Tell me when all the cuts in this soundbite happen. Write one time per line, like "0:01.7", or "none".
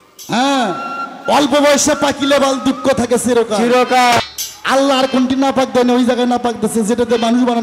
0:04.2